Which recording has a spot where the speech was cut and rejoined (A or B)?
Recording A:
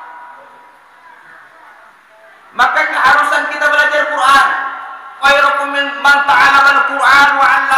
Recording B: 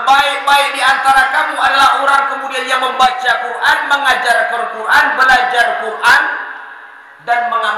A